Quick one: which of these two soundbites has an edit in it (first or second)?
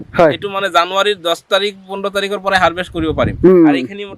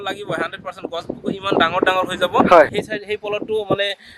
second